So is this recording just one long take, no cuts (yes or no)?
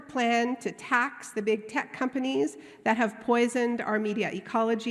yes